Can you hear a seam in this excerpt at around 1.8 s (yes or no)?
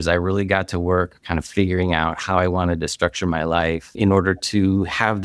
no